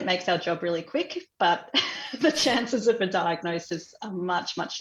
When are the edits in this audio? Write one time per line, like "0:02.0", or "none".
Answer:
none